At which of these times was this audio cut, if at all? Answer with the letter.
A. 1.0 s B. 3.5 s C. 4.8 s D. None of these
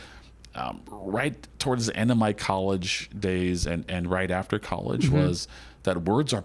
D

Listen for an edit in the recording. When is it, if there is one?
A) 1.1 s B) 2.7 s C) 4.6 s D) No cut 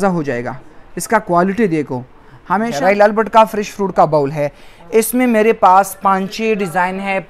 B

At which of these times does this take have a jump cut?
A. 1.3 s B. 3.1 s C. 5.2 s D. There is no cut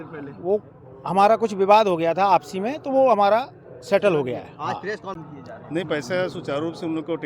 C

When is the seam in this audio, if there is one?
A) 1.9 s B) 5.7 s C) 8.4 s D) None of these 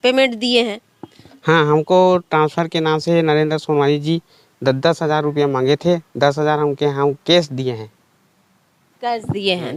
D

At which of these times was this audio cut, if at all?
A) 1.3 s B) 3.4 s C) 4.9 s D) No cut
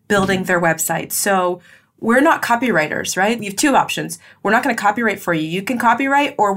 B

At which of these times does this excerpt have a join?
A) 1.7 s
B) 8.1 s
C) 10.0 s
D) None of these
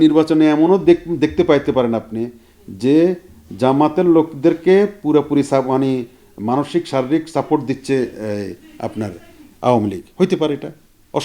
D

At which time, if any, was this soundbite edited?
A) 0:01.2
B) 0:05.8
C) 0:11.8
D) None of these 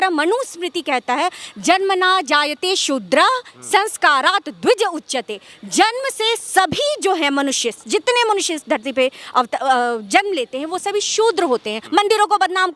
C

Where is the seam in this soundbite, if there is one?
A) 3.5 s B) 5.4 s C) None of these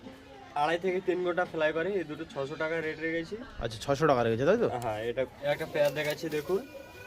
B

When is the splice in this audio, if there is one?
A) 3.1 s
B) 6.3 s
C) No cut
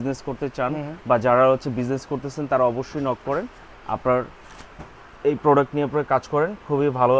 C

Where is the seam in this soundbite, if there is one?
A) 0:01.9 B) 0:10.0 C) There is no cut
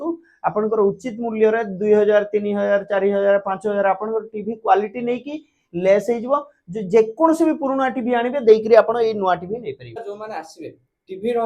B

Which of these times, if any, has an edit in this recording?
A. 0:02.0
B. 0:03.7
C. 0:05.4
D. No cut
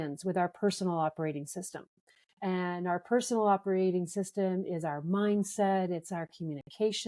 D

